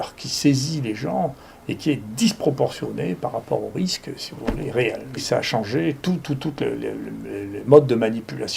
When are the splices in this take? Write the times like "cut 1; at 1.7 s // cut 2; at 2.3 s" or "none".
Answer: cut 1; at 5.2 s